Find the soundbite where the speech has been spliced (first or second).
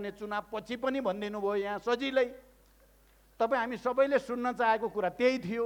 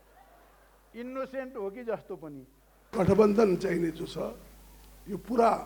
second